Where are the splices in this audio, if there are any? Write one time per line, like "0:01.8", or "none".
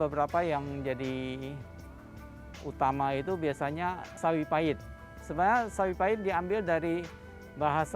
0:04.1